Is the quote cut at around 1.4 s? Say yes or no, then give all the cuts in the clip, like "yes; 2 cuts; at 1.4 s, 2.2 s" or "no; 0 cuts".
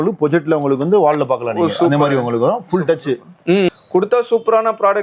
no; 1 cut; at 3.7 s